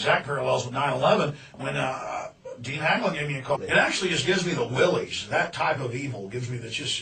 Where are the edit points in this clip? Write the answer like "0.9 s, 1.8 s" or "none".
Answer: none